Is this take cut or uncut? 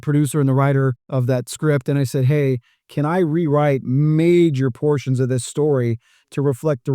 cut